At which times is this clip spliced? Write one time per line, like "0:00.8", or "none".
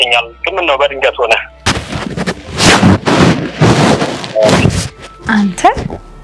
none